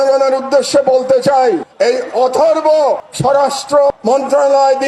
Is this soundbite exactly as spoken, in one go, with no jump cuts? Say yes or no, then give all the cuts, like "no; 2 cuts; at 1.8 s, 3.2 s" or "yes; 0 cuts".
no; 2 cuts; at 3.1 s, 3.9 s